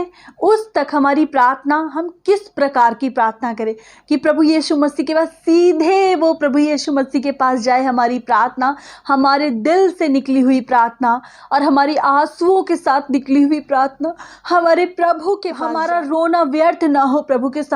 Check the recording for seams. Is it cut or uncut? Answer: cut